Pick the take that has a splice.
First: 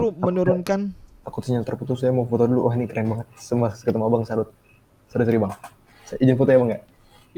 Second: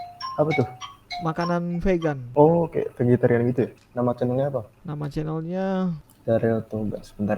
second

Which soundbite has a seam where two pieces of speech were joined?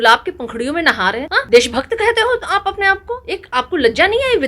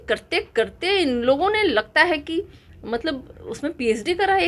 first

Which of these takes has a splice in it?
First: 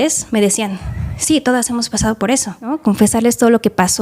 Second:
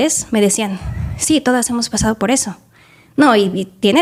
first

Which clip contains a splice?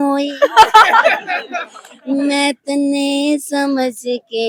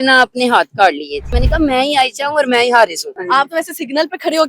second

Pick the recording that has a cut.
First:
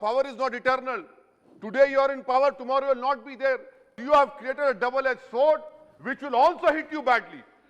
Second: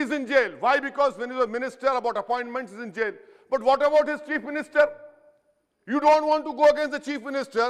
first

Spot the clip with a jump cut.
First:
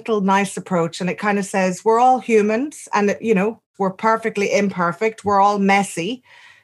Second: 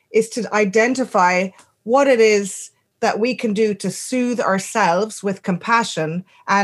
first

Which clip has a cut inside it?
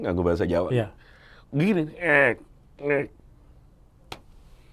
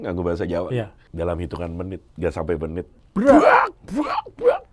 second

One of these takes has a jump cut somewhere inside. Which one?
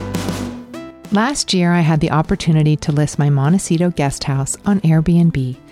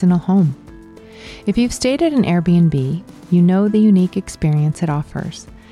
first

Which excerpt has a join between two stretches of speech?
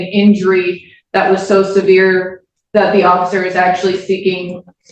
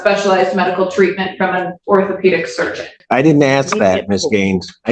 second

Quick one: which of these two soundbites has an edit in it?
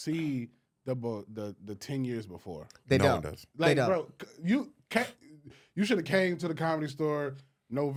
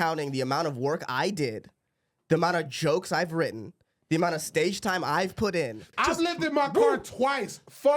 second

